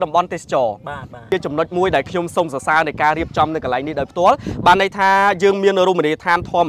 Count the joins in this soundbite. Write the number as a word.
one